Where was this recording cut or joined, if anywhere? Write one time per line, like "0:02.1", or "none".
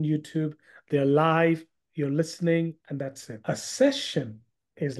0:03.3